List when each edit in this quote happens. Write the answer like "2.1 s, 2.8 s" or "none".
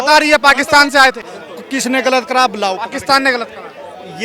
1.3 s